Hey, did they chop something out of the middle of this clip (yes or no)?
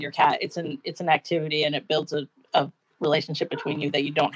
no